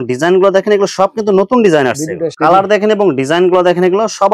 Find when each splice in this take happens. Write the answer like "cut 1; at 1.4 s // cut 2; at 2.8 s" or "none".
cut 1; at 2.3 s